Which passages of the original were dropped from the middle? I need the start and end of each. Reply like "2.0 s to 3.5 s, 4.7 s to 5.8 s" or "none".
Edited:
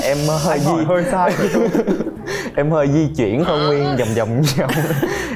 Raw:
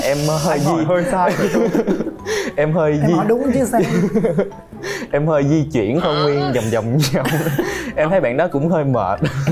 2.2 s to 4.7 s